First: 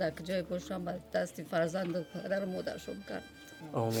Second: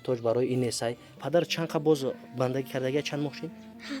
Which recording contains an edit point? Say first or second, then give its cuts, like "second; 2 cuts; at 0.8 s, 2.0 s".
second; 1 cut; at 1.2 s